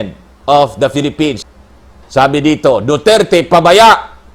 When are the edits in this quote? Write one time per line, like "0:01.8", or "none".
0:01.4